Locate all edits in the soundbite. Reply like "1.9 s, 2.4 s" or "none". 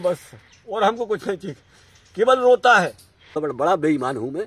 3.3 s